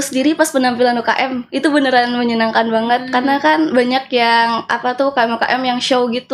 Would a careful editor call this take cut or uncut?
uncut